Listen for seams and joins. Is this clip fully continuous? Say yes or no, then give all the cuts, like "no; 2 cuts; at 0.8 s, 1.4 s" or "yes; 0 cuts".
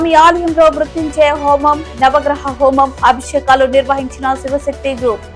yes; 0 cuts